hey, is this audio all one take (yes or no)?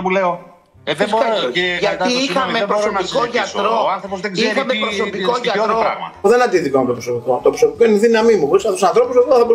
yes